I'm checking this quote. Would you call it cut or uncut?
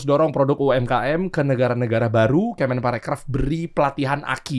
uncut